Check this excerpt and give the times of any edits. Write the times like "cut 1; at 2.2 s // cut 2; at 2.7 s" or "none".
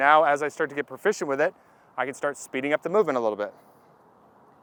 none